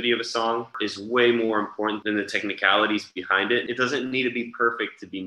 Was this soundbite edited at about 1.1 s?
no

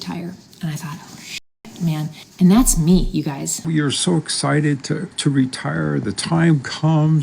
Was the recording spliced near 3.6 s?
yes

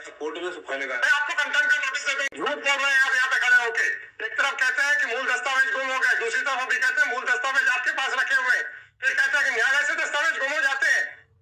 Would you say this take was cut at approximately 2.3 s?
yes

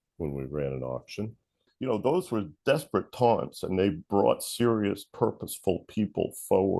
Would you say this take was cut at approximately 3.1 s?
no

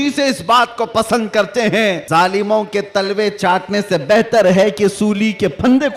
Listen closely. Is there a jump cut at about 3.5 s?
no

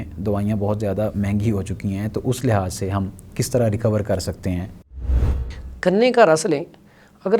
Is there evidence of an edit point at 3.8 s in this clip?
no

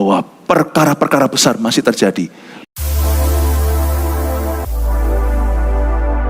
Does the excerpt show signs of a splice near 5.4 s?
no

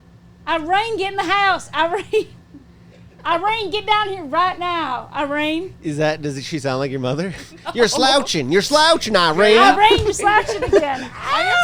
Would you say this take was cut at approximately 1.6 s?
no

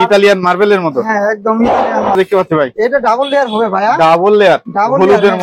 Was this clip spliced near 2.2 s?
yes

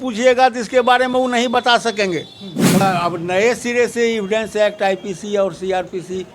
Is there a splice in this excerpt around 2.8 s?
yes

